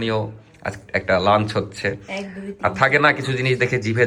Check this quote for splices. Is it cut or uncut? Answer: uncut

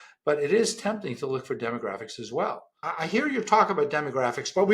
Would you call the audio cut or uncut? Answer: cut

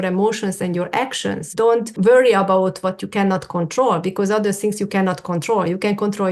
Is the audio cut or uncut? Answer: cut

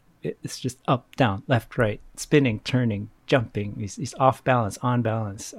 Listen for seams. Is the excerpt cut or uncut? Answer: uncut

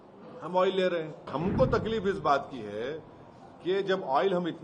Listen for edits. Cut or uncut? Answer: cut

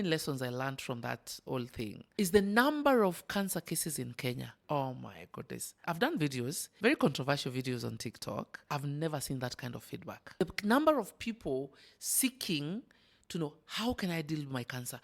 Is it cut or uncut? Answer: cut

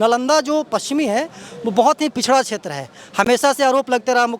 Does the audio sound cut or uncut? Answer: uncut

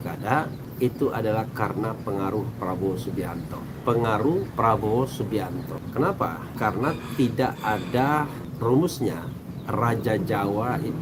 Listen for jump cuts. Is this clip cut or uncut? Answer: uncut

